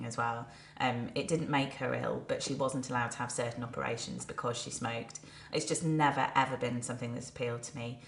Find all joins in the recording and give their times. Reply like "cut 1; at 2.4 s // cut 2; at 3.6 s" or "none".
cut 1; at 4.7 s